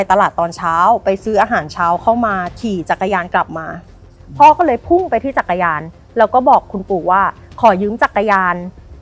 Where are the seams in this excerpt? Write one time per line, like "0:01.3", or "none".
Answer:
0:02.5